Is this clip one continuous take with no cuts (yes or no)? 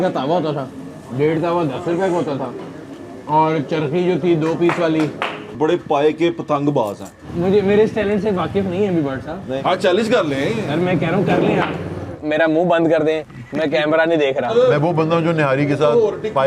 no